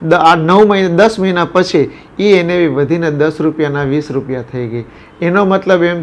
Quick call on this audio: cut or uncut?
uncut